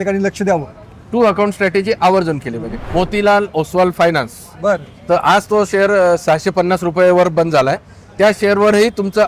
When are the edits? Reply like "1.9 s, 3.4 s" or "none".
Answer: 2.8 s

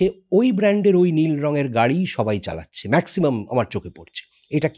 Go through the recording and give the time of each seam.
none

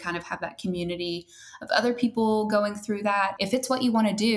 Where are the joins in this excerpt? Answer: 3.3 s

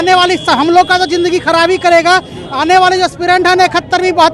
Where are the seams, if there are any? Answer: none

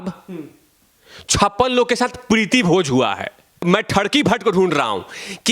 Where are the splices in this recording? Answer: 3.5 s

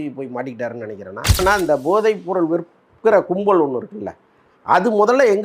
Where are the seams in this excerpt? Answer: 1.4 s

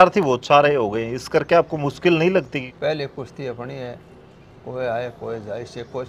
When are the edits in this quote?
2.6 s

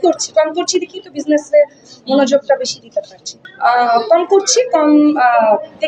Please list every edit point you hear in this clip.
3.3 s

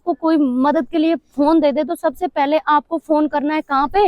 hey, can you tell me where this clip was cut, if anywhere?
none

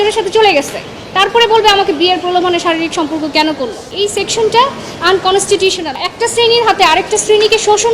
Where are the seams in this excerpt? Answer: 3.9 s, 6.0 s

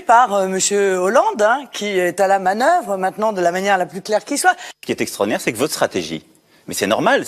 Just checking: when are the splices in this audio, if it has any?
1.0 s

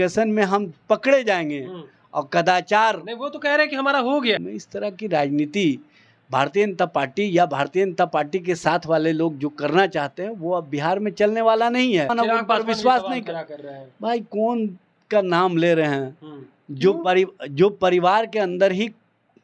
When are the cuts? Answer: 4.5 s, 12.1 s

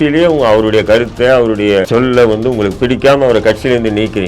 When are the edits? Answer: 1.9 s

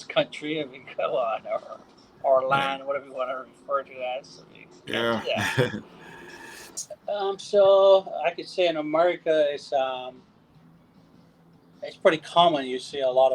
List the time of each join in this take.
6.7 s

